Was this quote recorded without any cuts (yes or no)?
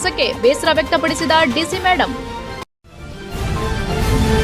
no